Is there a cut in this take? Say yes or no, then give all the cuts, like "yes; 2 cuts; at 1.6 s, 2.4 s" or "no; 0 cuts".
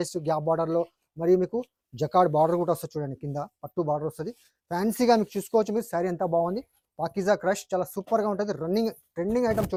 no; 0 cuts